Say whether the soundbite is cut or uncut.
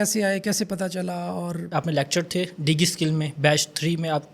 uncut